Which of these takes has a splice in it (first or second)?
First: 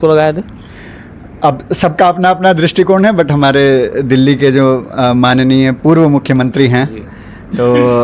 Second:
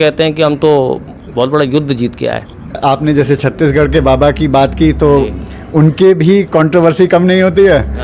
second